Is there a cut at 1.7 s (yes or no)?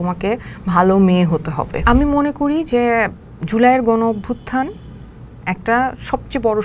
yes